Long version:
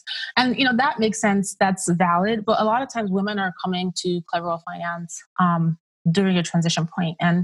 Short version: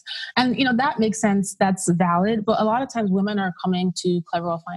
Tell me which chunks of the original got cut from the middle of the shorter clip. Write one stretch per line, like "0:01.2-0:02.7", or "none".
none